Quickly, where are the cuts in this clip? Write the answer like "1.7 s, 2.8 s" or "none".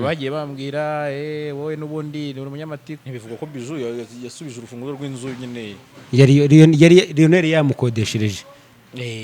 2.9 s